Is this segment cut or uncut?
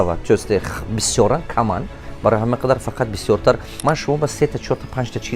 cut